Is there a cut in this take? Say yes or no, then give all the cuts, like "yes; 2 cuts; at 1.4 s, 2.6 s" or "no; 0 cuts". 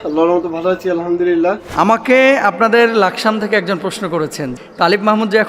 yes; 2 cuts; at 1.7 s, 4.5 s